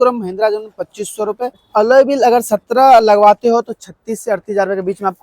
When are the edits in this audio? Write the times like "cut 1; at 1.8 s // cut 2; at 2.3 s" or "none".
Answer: cut 1; at 1.6 s